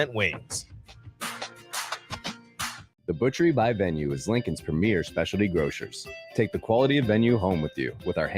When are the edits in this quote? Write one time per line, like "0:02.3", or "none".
0:03.0